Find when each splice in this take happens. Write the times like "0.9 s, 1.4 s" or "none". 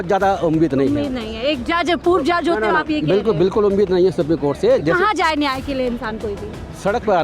none

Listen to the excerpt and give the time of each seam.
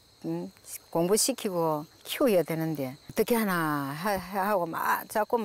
3.0 s

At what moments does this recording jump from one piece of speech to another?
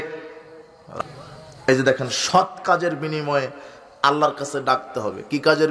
1.0 s

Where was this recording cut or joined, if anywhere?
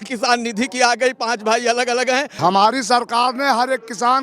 2.3 s

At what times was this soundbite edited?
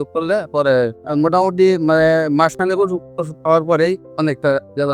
1.0 s

